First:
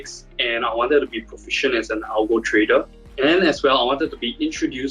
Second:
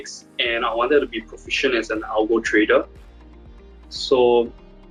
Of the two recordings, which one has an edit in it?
first; 1 cut; at 3.0 s

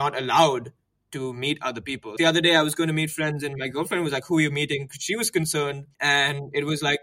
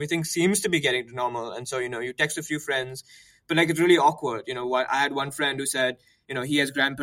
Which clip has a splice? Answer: first; 2 cuts; at 2.1 s, 5.9 s

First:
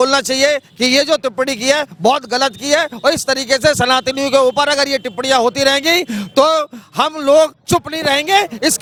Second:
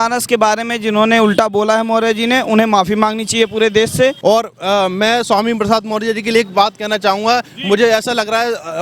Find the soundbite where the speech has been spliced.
second; 1 cut; at 4.2 s

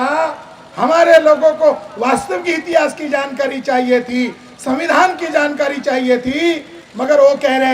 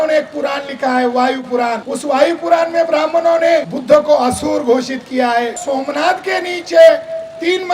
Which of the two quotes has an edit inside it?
second; 3 cuts; at 1.9 s, 3.7 s, 5.6 s

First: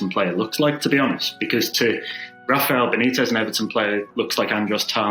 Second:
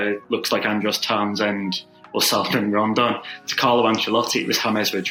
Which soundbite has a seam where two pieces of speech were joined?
first; 1 cut; at 2.5 s

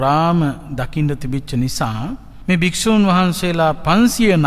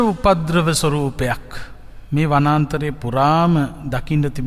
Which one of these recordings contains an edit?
first; 1 cut; at 2.3 s

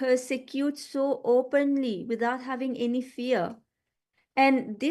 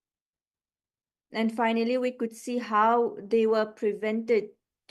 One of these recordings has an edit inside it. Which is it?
first; 2 cuts; at 1.0 s, 2.6 s

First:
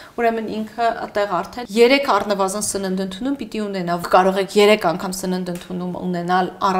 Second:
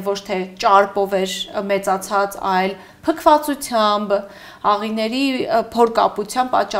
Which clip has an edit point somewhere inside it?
first; 2 cuts; at 1.6 s, 4.0 s

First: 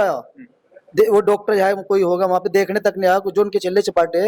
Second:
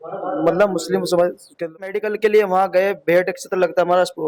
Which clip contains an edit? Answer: second; 1 cut; at 1.7 s

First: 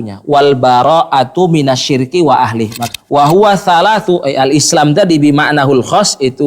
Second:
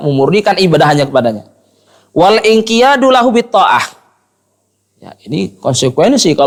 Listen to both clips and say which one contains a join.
first; 1 cut; at 2.8 s

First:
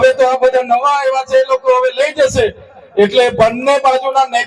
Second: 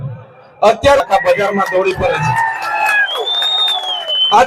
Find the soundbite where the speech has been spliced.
second; 1 cut; at 1.0 s

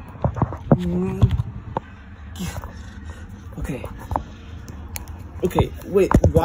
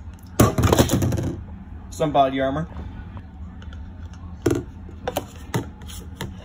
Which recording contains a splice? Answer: second; 1 cut; at 3.0 s

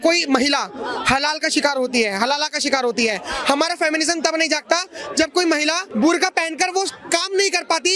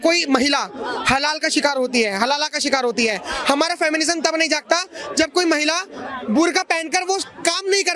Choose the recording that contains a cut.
first; 1 cut; at 5.8 s

